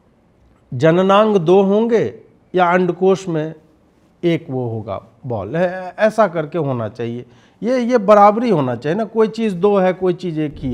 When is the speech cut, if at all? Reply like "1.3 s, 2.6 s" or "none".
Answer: none